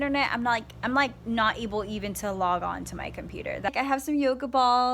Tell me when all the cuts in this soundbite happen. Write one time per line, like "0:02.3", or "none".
0:03.7